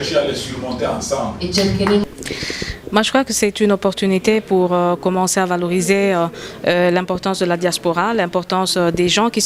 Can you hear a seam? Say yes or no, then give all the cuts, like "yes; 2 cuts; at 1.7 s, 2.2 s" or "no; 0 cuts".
yes; 1 cut; at 2.1 s